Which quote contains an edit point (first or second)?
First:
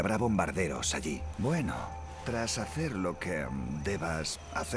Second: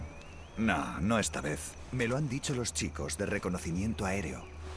second